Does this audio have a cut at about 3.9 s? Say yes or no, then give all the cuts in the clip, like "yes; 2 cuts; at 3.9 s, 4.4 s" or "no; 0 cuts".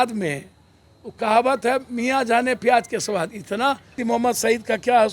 yes; 1 cut; at 3.9 s